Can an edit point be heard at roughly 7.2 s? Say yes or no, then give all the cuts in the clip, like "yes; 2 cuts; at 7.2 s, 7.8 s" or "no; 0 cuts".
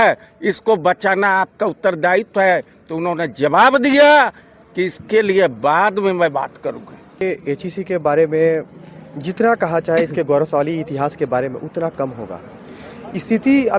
yes; 1 cut; at 7.2 s